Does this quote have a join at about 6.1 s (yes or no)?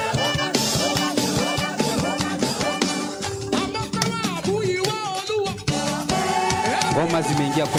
no